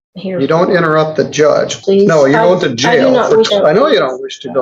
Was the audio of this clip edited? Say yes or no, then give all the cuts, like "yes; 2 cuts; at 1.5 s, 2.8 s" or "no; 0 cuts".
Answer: yes; 2 cuts; at 1.8 s, 3.5 s